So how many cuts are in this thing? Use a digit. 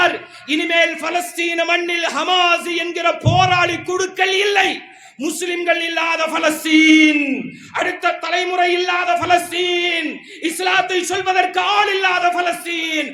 0